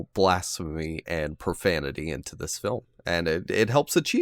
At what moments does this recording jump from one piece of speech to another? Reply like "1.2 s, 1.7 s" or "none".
none